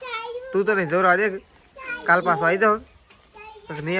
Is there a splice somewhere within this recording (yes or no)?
no